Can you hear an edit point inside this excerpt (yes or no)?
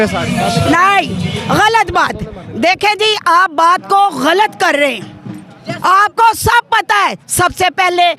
no